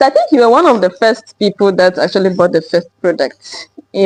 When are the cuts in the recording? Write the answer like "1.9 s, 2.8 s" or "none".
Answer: none